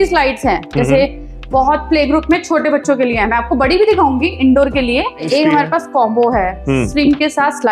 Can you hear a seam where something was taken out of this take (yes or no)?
yes